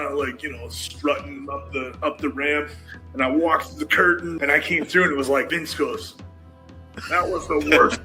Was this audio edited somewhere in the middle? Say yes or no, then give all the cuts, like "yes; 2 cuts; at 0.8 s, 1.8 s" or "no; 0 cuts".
yes; 2 cuts; at 4.3 s, 5.5 s